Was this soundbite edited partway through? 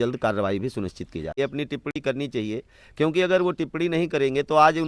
yes; 1 cut; at 1.4 s

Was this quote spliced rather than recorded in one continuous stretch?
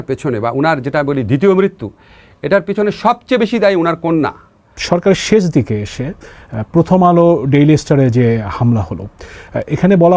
no; 0 cuts

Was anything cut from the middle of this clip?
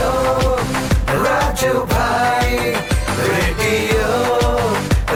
no; 0 cuts

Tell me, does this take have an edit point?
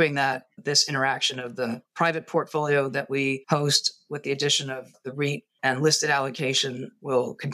yes; 1 cut; at 3.4 s

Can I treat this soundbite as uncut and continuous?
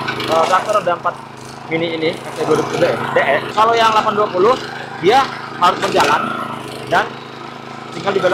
no; 1 cut; at 3.5 s

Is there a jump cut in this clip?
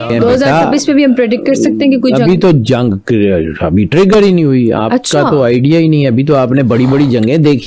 no; 0 cuts

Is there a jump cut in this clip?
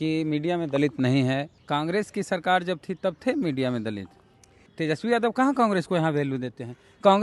yes; 2 cuts; at 1.5 s, 4.6 s

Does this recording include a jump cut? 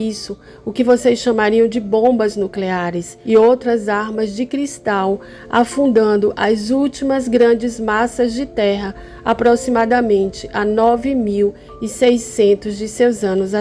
no; 0 cuts

